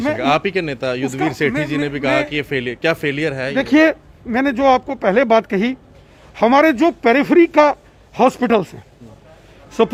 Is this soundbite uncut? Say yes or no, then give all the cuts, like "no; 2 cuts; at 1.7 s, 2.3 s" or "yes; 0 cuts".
yes; 0 cuts